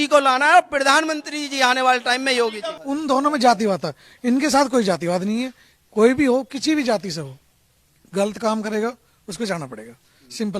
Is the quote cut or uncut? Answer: cut